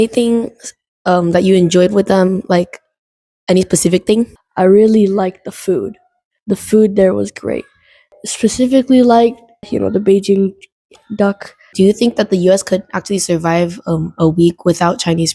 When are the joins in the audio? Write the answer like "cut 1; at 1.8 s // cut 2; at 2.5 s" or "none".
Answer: cut 1; at 4.4 s // cut 2; at 11.7 s